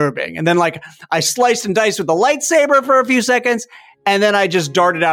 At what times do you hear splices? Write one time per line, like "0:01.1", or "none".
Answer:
none